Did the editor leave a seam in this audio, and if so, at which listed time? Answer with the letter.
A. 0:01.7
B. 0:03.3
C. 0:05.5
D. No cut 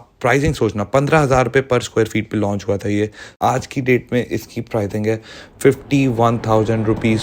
B